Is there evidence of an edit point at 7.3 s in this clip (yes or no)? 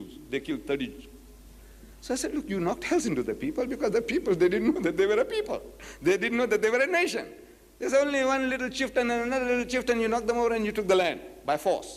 yes